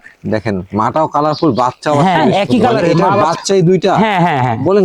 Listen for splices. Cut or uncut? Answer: cut